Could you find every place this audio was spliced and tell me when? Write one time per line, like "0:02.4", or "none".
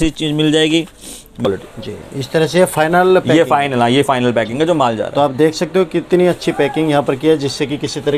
0:01.5